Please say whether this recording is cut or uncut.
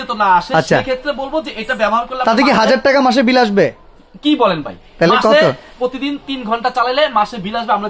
uncut